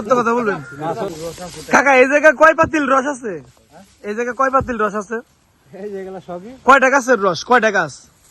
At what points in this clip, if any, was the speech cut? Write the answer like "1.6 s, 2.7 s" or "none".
1.1 s